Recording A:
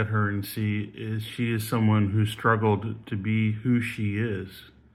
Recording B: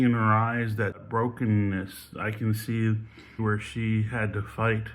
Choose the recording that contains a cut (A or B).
B